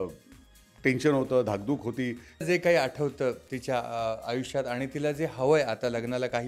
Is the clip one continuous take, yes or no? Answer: no